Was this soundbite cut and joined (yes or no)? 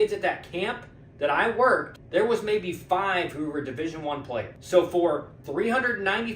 yes